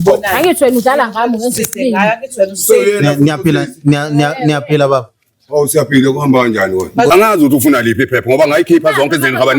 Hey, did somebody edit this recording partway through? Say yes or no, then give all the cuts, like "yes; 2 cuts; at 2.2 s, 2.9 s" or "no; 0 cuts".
yes; 1 cut; at 7.1 s